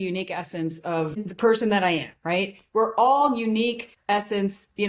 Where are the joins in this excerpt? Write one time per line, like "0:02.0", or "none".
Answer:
0:01.3
0:03.9